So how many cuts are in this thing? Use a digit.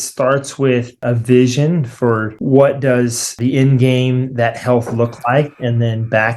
3